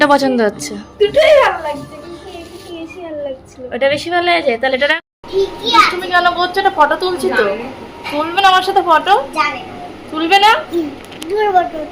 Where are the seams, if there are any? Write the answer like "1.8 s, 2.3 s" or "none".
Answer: 4.9 s